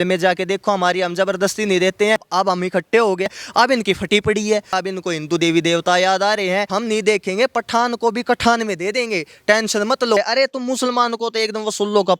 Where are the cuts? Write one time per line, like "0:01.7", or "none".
0:02.3
0:03.3
0:04.7
0:06.7
0:10.2